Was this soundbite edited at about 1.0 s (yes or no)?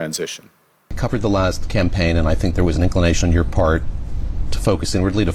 yes